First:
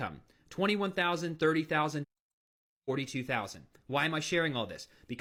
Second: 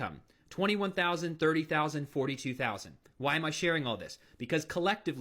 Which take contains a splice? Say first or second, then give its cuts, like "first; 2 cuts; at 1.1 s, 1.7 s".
second; 1 cut; at 2.1 s